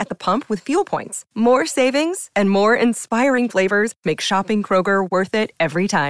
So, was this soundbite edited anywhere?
no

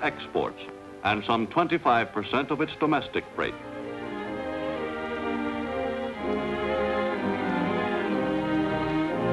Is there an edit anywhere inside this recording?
yes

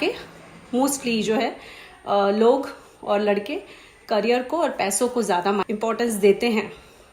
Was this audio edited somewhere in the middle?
yes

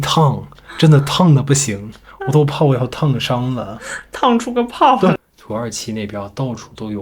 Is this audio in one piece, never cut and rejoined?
no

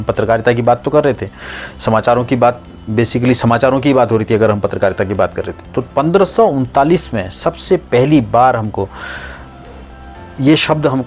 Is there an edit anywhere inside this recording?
no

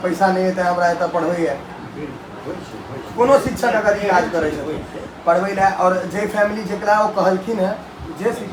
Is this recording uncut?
yes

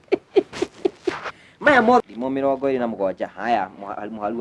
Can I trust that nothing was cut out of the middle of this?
no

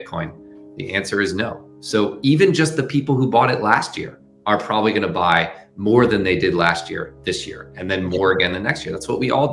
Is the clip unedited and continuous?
yes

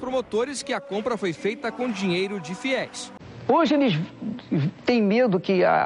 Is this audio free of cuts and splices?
no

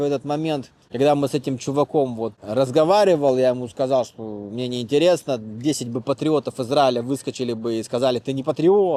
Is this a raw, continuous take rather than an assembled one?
yes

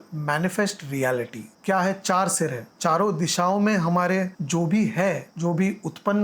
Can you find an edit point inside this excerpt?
yes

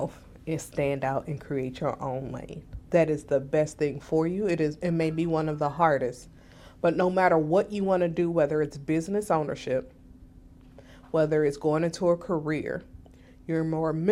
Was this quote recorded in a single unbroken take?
yes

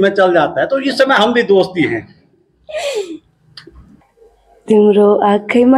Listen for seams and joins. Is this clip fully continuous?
no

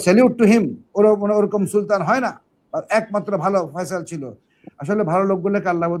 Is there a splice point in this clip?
no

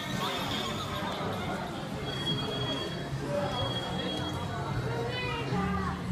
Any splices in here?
no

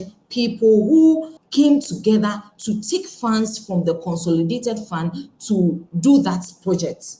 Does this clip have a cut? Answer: yes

